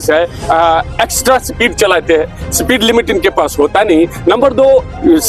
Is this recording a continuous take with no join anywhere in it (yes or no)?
yes